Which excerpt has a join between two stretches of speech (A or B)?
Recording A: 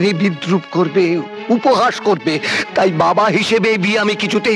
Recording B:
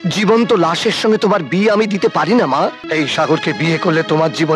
B